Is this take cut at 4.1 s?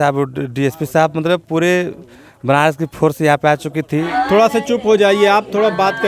yes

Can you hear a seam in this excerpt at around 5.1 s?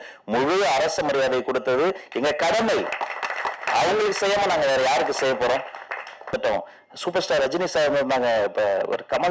no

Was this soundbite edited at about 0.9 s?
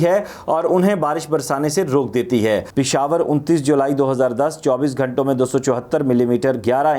no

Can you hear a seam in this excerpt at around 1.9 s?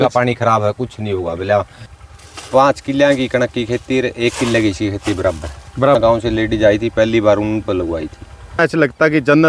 yes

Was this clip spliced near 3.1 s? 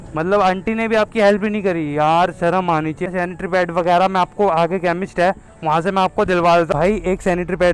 yes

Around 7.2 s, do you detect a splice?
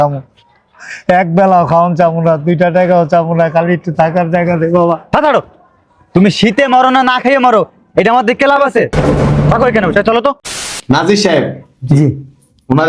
no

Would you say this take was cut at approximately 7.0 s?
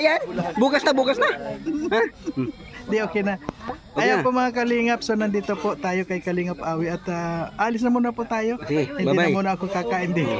no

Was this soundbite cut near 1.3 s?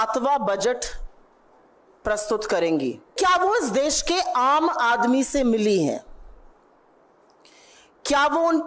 no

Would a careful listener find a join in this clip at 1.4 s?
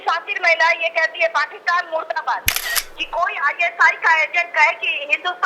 no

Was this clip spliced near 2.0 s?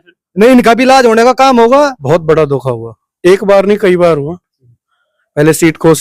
yes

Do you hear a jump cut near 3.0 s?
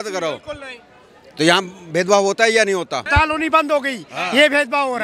yes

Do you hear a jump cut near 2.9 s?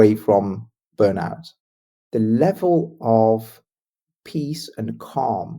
no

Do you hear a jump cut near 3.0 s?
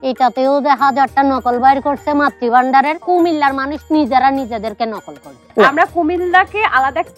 yes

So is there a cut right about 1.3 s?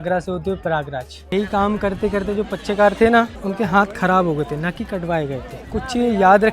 yes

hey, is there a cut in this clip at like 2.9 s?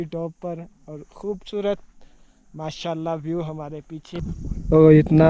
no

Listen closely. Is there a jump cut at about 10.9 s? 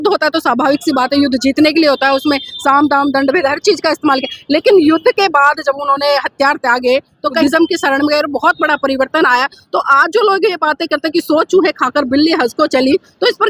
no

